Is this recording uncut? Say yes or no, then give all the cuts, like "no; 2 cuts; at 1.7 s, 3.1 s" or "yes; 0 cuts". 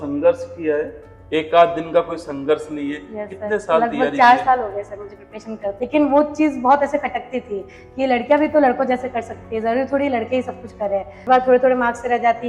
no; 2 cuts; at 5.7 s, 11.3 s